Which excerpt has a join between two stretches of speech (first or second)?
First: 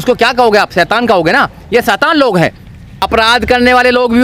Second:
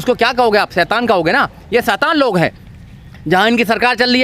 first